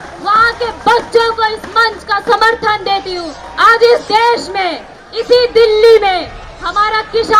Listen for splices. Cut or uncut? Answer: cut